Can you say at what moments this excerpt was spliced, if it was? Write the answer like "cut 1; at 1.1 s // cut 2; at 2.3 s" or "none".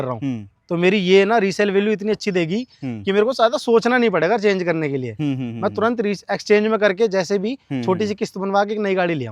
none